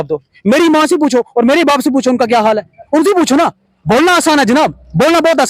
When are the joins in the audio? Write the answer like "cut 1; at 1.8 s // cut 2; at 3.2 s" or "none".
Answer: none